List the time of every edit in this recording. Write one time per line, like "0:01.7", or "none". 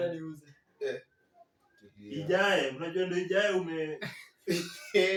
none